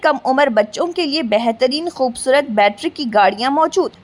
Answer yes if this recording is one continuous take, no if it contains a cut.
yes